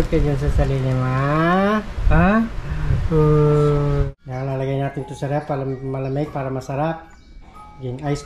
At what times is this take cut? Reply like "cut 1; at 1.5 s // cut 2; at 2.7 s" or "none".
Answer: cut 1; at 4.1 s